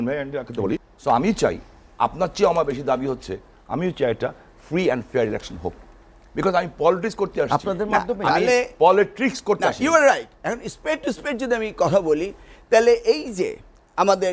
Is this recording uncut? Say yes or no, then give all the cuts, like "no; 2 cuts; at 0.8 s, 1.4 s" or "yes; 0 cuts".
no; 1 cut; at 0.9 s